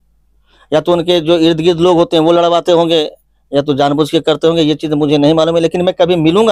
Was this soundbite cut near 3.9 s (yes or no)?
no